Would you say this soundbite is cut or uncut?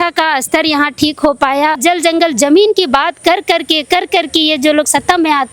cut